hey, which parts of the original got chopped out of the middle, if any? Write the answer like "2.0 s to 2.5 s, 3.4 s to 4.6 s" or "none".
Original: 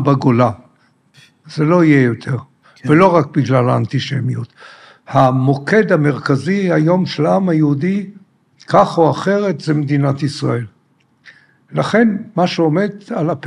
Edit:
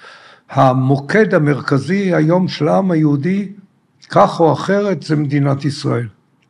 none